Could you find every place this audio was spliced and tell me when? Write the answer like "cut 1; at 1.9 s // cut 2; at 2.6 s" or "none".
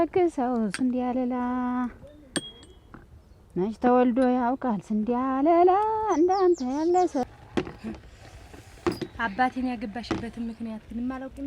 cut 1; at 7.2 s